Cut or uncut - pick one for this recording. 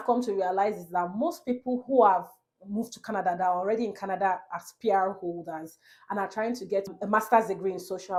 uncut